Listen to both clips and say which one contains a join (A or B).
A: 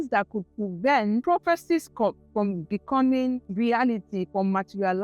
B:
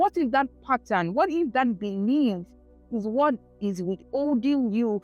A